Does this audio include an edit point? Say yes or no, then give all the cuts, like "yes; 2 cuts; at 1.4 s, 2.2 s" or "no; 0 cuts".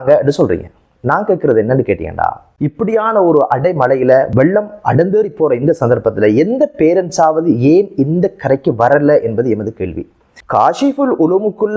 yes; 3 cuts; at 2.5 s, 4.3 s, 10.2 s